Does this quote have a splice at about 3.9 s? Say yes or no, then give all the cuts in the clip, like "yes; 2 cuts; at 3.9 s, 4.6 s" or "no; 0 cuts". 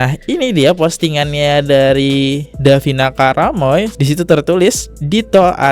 yes; 1 cut; at 3.9 s